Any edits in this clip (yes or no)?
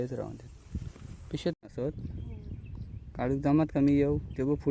yes